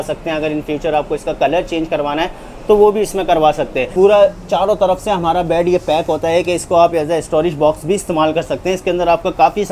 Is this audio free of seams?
no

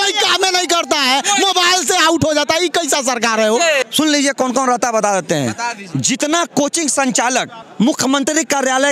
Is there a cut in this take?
yes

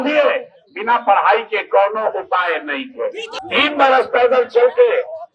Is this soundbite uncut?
no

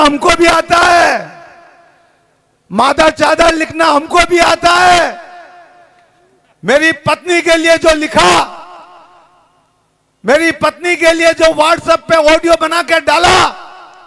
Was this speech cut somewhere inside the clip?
no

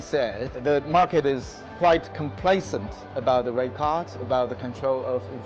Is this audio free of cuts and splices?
yes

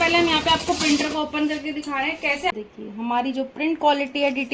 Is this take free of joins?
no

